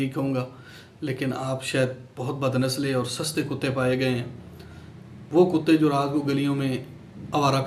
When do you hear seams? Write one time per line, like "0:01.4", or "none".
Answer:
none